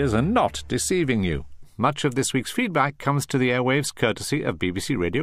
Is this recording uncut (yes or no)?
yes